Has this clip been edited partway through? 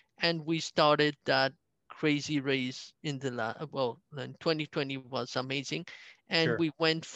no; 0 cuts

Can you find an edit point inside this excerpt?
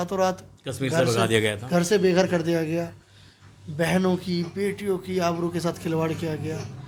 no; 0 cuts

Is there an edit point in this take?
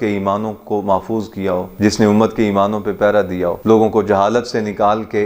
no; 0 cuts

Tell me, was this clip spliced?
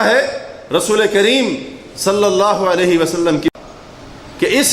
yes; 1 cut; at 3.5 s

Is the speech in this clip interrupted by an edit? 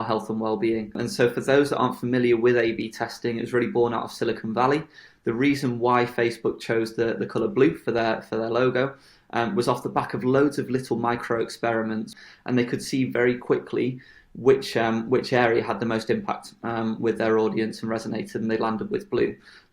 yes; 2 cuts; at 0.9 s, 12.1 s

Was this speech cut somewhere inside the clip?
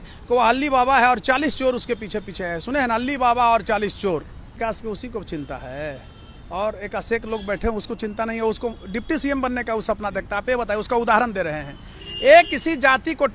yes; 1 cut; at 4.5 s

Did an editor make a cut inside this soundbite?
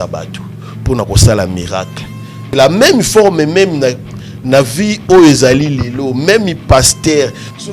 yes; 1 cut; at 2.5 s

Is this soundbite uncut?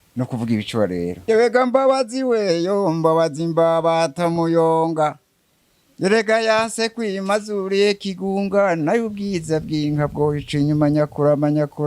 no; 1 cut; at 1.2 s

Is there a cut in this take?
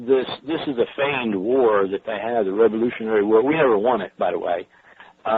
no; 0 cuts

